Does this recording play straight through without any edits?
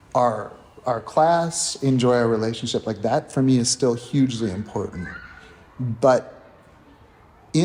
yes; 0 cuts

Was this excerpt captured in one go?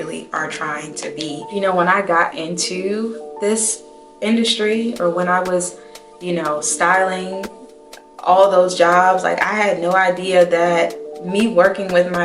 no; 1 cut; at 1.5 s

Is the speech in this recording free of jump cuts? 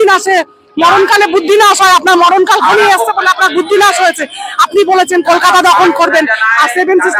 yes; 0 cuts

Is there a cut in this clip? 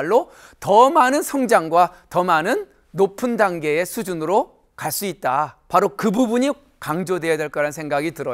yes; 1 cut; at 5.6 s

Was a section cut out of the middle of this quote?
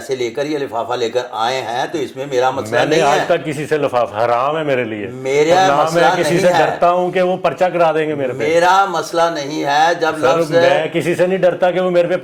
no; 0 cuts

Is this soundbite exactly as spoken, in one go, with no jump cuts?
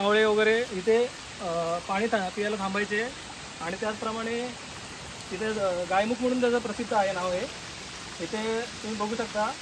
yes; 0 cuts

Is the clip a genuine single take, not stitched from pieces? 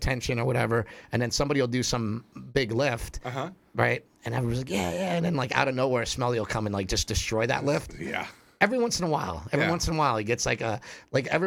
yes; 0 cuts

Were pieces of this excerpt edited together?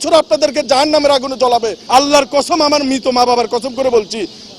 yes; 1 cut; at 1.8 s

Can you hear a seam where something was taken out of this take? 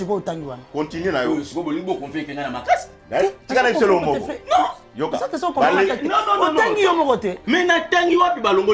no; 0 cuts

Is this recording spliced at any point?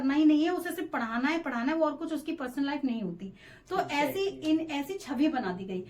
no; 0 cuts

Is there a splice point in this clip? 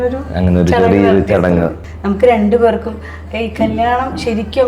yes; 1 cut; at 1.8 s

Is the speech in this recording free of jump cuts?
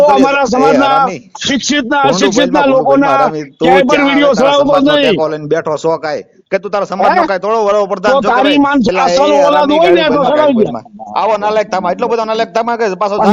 yes; 0 cuts

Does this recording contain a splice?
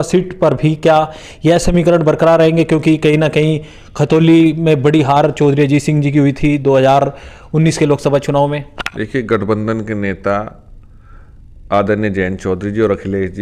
no; 0 cuts

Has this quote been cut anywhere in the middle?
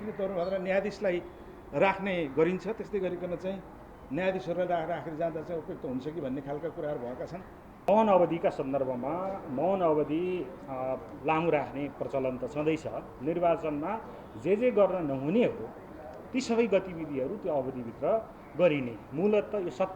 yes; 1 cut; at 7.8 s

